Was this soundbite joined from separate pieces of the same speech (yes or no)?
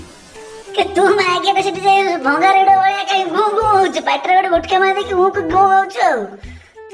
no